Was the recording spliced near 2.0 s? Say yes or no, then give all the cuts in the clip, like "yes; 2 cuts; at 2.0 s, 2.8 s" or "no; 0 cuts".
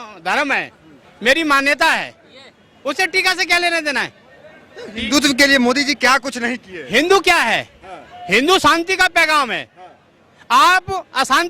no; 0 cuts